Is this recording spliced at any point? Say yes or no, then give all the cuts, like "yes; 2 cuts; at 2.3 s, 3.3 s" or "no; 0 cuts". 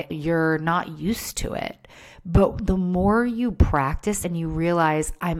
yes; 1 cut; at 4.2 s